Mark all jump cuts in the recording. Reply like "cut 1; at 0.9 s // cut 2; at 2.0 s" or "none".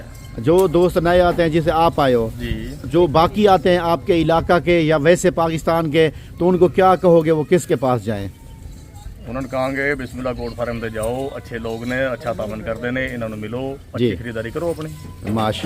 none